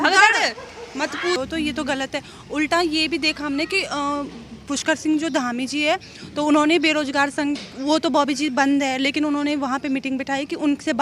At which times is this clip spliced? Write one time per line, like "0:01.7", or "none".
0:01.4